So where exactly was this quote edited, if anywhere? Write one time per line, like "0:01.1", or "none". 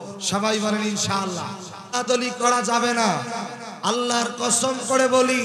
0:01.9